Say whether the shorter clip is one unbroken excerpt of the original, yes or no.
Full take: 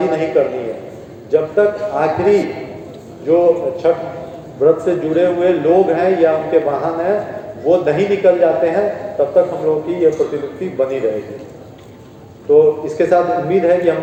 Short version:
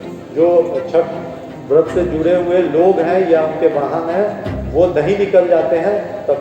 yes